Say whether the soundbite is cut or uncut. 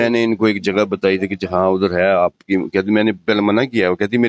uncut